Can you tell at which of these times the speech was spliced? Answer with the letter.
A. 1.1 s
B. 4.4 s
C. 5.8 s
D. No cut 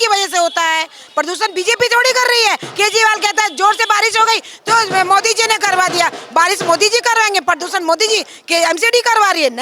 D